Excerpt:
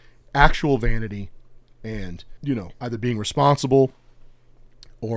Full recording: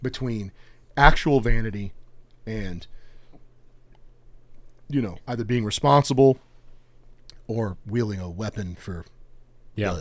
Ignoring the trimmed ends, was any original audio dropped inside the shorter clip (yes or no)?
yes